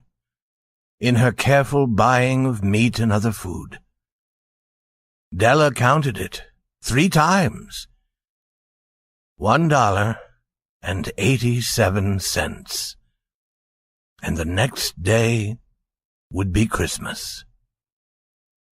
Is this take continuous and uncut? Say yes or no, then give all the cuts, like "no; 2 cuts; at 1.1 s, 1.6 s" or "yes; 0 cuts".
no; 1 cut; at 11.1 s